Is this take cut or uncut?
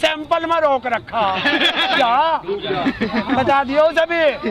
cut